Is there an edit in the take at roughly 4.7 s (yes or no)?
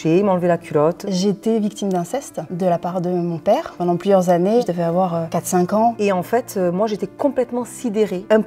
yes